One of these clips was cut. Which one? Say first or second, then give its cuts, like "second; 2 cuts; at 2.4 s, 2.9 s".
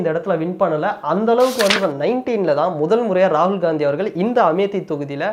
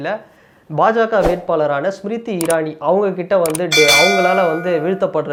first; 1 cut; at 1.8 s